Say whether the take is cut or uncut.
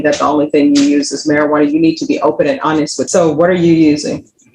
cut